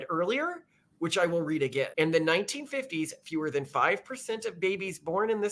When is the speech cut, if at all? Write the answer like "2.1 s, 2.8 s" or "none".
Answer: 1.9 s